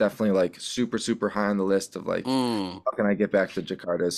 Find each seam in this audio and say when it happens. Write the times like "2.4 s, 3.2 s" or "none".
none